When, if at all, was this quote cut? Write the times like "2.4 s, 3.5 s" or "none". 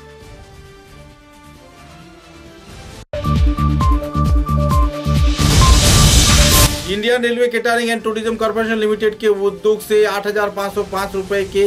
6.7 s